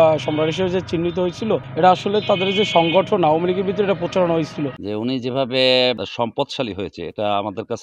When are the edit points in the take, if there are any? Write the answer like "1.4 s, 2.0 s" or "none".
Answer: 1.7 s, 4.8 s, 6.0 s